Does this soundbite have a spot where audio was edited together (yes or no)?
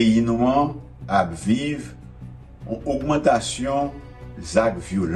no